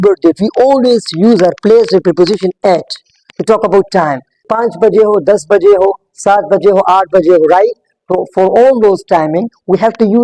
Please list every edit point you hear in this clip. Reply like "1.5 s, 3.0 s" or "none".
4.5 s